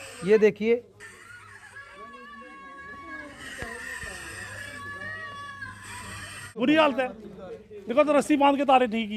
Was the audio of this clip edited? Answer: yes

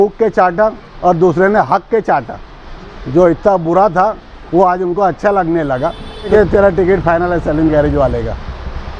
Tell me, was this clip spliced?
yes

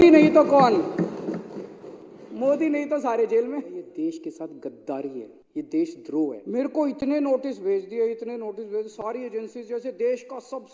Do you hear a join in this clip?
yes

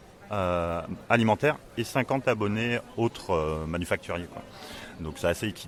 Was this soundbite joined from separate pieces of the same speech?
no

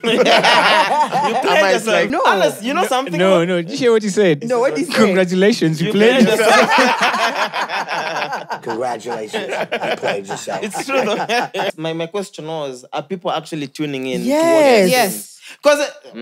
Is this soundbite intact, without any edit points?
no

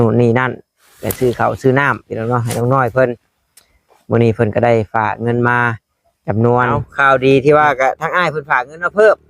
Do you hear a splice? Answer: yes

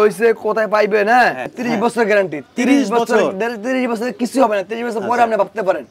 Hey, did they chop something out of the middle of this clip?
yes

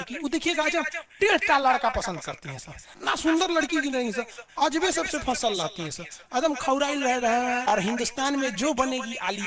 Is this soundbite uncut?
no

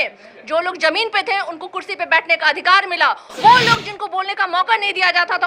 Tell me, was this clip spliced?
yes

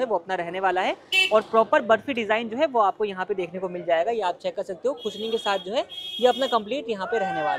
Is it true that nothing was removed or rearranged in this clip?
yes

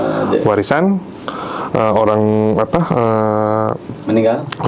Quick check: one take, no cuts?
yes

